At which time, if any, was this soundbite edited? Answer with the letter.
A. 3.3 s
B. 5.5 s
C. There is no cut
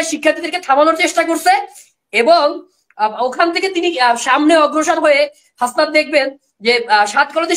C